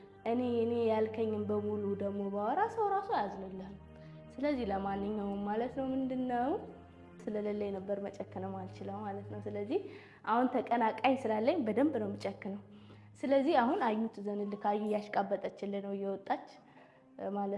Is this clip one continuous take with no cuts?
no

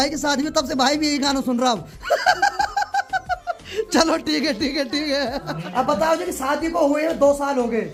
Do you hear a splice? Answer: no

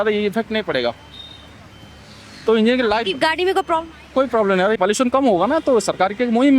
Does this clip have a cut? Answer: yes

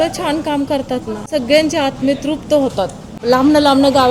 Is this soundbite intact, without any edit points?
no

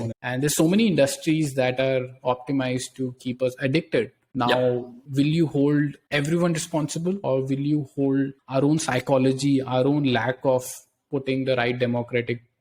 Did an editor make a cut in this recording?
no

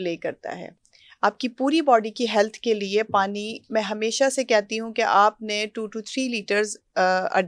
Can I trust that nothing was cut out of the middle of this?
yes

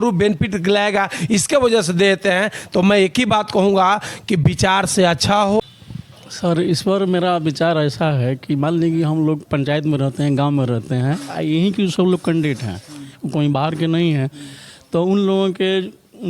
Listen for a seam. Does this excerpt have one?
yes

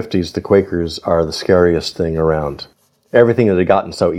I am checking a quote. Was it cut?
yes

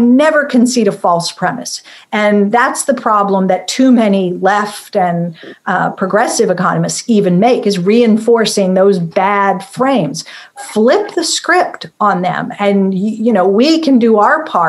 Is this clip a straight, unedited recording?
yes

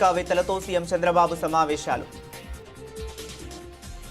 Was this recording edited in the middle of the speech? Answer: yes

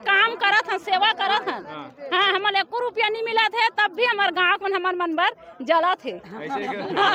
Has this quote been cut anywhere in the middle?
no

